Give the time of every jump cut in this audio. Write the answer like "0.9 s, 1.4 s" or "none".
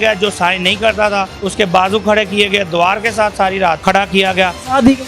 1.4 s, 3.8 s